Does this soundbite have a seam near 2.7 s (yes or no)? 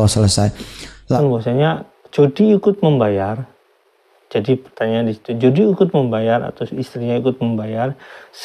no